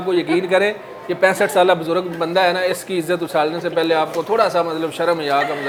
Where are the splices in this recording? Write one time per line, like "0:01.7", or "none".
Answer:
none